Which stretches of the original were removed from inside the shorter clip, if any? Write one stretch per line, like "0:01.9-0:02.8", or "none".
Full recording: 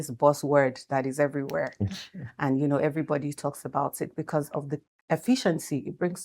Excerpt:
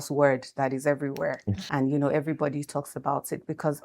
0:01.9-0:02.2